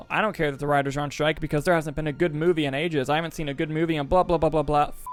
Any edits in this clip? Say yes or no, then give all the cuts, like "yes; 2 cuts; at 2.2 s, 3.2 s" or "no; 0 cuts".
no; 0 cuts